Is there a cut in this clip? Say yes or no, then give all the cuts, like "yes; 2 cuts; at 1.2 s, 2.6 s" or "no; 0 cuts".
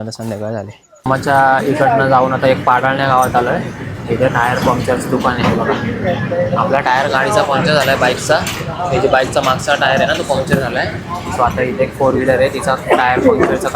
yes; 1 cut; at 1.1 s